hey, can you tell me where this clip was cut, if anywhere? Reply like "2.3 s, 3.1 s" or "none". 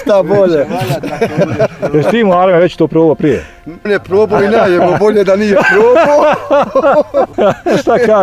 3.9 s, 7.3 s